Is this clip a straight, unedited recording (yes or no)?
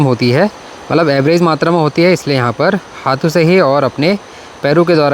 yes